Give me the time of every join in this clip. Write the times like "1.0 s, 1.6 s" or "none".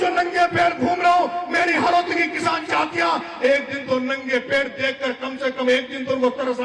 none

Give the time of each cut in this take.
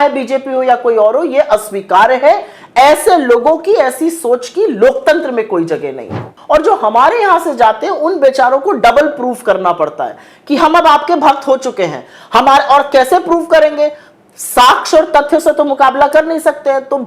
6.3 s

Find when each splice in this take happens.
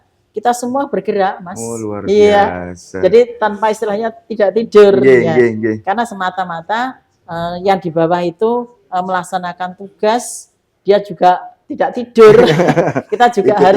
11.6 s

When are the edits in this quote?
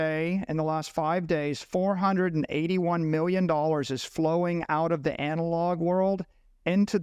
none

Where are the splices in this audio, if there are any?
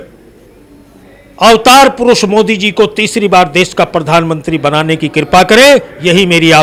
none

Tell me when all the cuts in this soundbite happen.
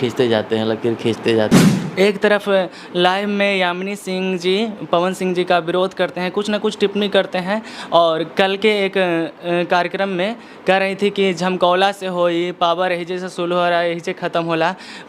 1.7 s

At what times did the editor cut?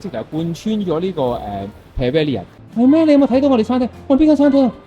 2.5 s

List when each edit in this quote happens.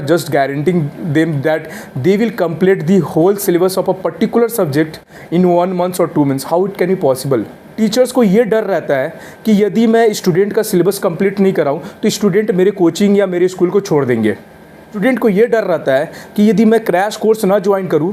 7.6 s, 14.9 s

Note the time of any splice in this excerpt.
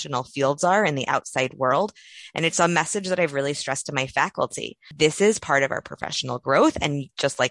4.9 s

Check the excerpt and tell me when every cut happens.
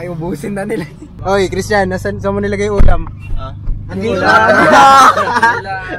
1.0 s

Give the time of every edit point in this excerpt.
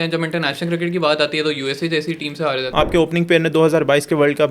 2.7 s

